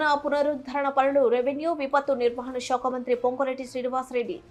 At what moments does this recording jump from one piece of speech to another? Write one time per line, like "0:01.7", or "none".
none